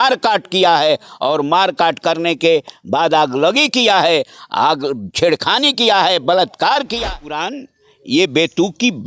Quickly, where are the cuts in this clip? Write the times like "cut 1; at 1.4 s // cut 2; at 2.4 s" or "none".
cut 1; at 7.0 s